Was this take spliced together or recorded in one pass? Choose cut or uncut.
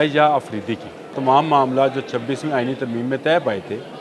cut